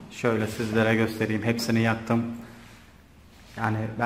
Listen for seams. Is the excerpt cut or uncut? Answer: uncut